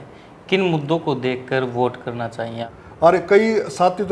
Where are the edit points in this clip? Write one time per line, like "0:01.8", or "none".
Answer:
0:02.6